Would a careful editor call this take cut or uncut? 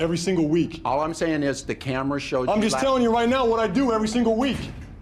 uncut